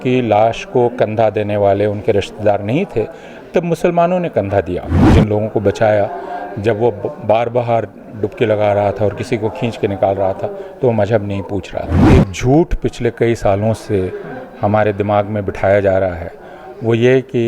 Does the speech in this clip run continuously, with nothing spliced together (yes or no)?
no